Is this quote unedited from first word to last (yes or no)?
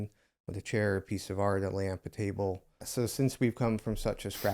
no